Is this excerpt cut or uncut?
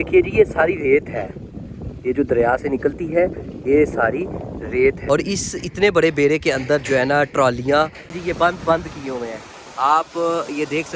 cut